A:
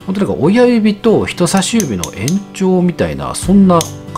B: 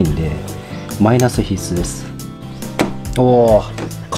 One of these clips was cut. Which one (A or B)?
B